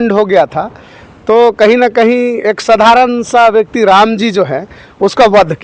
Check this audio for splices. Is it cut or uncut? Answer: uncut